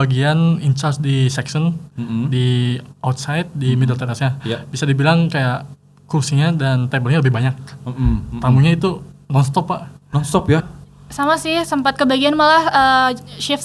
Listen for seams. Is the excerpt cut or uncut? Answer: cut